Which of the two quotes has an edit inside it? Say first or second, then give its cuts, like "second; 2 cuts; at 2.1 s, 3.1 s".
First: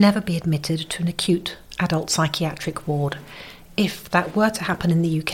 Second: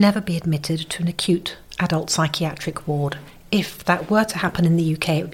second; 1 cut; at 3.3 s